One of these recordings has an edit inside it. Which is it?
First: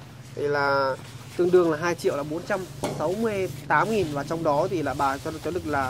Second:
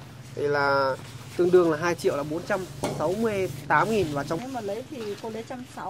second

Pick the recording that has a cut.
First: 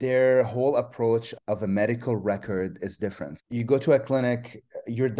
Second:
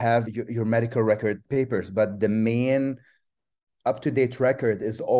first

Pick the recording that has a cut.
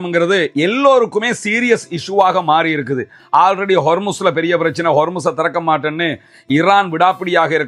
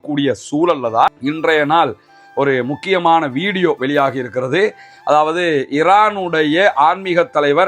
second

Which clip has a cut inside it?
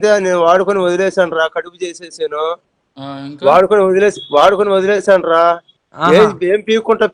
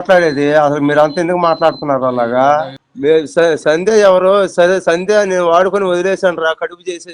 second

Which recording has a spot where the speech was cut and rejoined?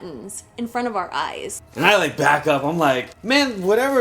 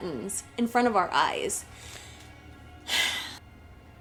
first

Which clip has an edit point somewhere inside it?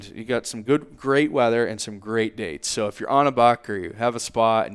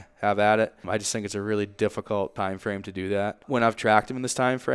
second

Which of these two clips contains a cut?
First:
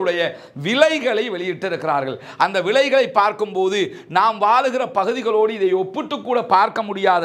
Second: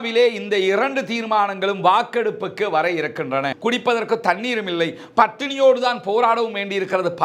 second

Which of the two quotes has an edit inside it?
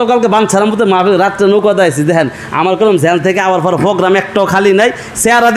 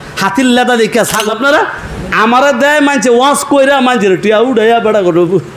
second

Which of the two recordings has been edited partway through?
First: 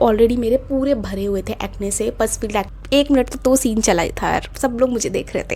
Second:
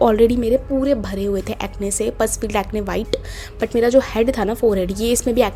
first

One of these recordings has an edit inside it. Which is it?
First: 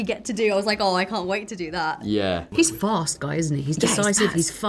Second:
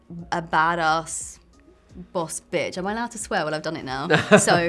first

